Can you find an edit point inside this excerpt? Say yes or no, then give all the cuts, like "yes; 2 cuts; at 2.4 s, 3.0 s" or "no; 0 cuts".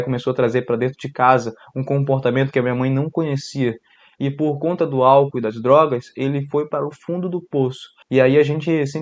yes; 2 cuts; at 3.9 s, 7.9 s